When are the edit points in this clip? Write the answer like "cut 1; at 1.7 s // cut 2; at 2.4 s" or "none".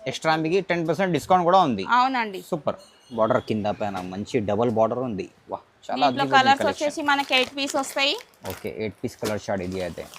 cut 1; at 3.1 s